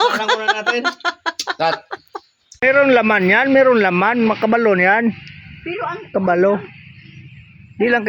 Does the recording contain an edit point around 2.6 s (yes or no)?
yes